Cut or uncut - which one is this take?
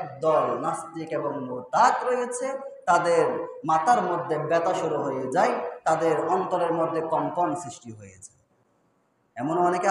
uncut